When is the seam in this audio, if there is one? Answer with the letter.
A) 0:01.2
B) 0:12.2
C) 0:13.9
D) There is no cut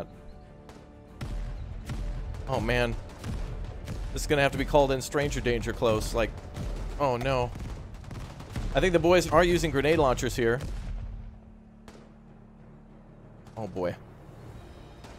A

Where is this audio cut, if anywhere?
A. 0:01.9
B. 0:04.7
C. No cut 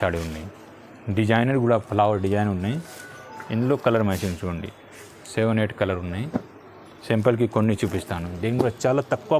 C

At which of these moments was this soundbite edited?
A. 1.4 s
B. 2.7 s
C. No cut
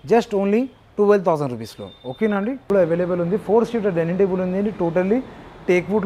B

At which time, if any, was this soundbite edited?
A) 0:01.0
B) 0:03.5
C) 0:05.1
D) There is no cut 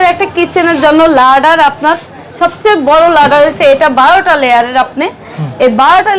D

